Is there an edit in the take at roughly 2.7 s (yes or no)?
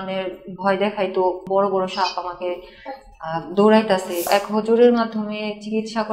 no